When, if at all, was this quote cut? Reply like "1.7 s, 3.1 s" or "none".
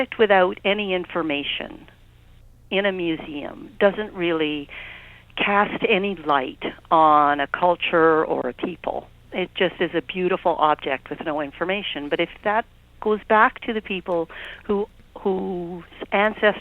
none